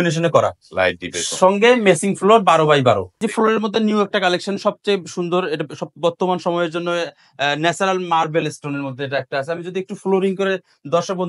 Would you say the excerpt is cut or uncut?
cut